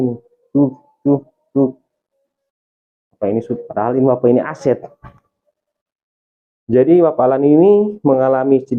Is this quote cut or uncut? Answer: uncut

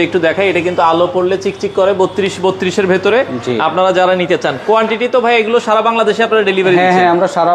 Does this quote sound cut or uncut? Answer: uncut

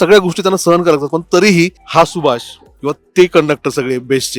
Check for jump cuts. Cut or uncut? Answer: cut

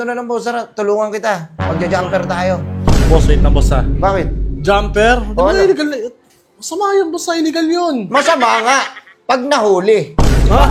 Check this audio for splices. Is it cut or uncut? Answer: uncut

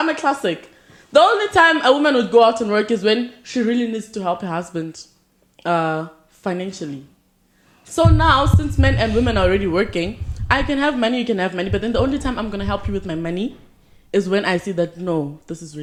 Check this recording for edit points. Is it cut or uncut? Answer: uncut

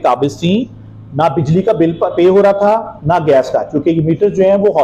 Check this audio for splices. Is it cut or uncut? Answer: uncut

